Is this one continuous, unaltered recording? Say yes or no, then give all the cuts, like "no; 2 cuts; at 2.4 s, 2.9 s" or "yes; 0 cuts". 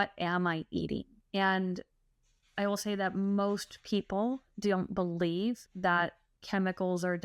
no; 1 cut; at 1.2 s